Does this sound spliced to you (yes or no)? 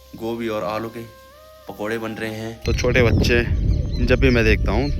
yes